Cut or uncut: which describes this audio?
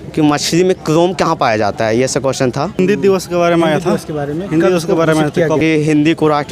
cut